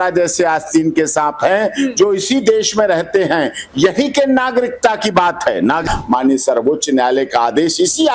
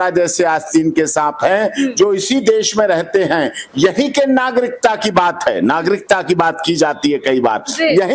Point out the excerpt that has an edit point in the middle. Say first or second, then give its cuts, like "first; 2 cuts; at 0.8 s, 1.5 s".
first; 1 cut; at 5.8 s